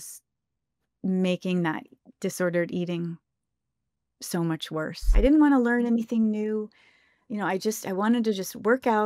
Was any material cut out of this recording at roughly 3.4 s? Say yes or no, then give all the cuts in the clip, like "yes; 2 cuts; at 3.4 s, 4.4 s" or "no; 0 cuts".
no; 1 cut; at 5.0 s